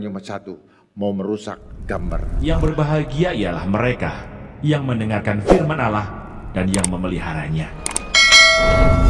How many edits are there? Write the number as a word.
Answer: one